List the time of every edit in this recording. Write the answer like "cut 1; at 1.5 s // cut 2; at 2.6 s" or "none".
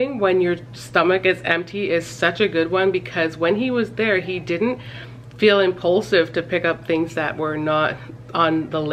none